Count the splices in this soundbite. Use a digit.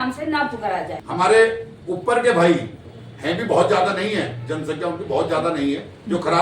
1